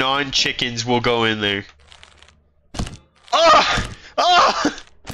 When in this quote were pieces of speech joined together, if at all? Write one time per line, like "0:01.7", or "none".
none